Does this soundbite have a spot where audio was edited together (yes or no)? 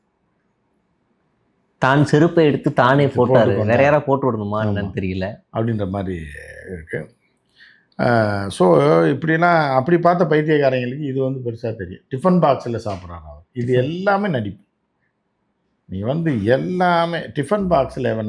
no